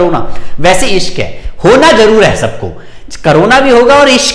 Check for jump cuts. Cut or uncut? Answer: uncut